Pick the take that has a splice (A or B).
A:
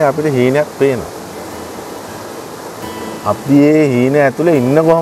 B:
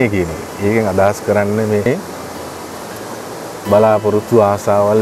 B